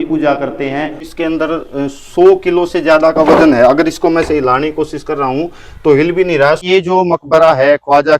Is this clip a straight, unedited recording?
no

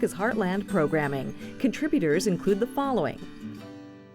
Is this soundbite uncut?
no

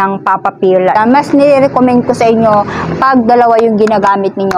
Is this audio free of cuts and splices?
no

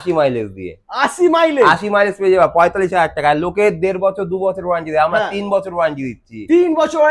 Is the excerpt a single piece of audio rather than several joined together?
yes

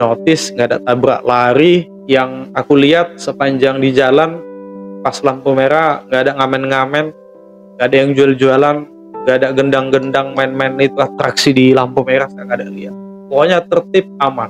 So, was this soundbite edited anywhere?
yes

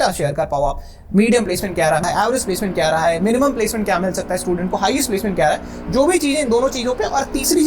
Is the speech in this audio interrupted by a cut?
yes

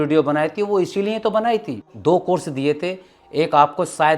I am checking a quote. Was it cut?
yes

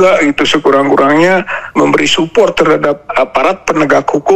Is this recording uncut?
no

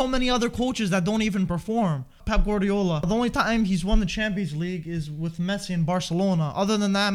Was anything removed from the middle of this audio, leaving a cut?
yes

